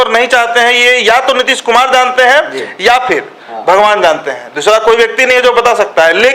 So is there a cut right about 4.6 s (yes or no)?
no